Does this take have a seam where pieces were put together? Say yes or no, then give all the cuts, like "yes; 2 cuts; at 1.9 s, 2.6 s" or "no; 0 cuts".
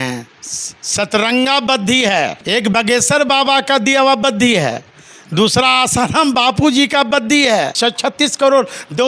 yes; 2 cuts; at 2.4 s, 7.7 s